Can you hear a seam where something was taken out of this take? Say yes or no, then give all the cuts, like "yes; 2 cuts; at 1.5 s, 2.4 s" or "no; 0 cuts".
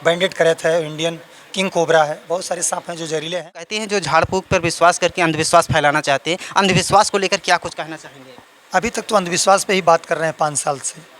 yes; 1 cut; at 3.8 s